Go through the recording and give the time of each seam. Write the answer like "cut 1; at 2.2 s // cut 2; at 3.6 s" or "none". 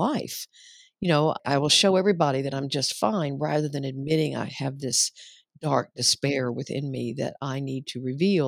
cut 1; at 1.4 s